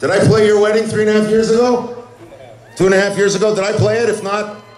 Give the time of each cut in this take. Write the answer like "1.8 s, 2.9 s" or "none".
none